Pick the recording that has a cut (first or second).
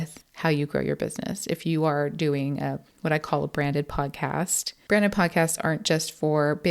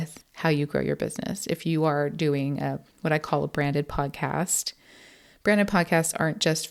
first